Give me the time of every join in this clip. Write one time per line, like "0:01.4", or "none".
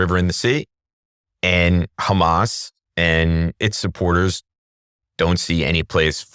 none